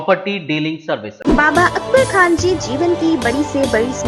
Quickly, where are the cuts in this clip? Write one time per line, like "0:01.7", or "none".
0:01.1